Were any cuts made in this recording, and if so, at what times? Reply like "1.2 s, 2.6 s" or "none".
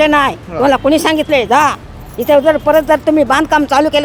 none

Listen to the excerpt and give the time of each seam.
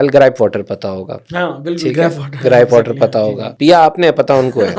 3.4 s

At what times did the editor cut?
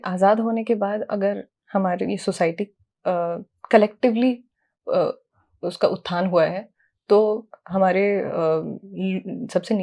none

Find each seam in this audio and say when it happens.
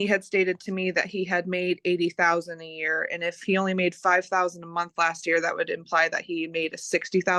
none

